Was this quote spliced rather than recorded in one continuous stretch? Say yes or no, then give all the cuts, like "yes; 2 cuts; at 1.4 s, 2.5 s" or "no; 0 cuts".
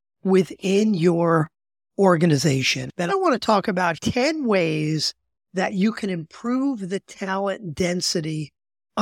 yes; 2 cuts; at 3.1 s, 4.0 s